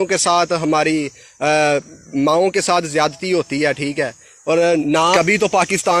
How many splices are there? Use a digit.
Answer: 1